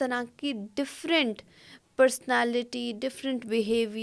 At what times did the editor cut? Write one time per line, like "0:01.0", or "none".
none